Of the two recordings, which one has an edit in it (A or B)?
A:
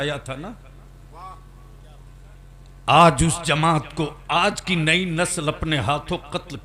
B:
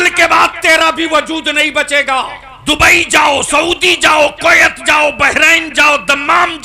B